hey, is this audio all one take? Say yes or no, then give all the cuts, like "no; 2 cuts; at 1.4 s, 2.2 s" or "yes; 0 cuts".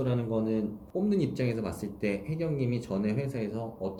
yes; 0 cuts